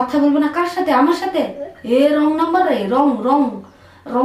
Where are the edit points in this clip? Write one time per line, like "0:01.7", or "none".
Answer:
none